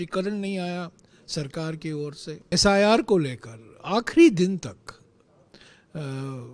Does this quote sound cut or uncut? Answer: cut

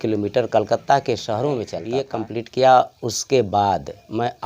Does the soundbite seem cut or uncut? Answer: cut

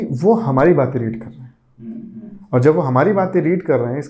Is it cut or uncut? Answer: uncut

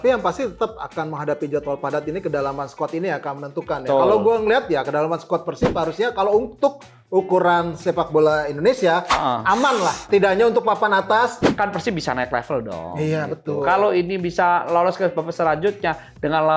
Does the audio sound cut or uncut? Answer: cut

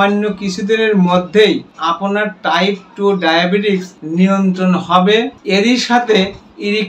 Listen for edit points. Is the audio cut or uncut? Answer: cut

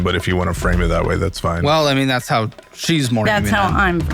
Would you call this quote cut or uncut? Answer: cut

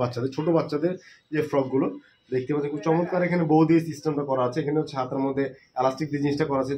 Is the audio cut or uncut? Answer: uncut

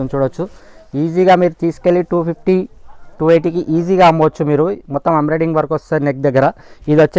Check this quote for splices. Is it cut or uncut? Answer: uncut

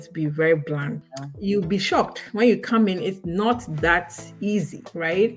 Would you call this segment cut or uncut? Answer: cut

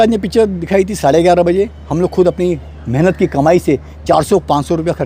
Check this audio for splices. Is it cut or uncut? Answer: uncut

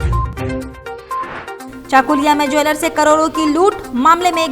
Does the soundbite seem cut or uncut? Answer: cut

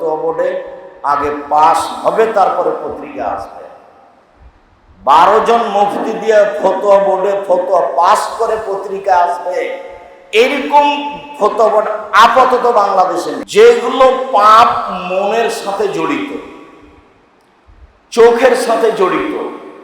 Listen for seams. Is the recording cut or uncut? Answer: cut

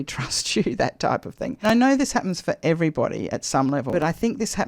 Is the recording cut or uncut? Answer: cut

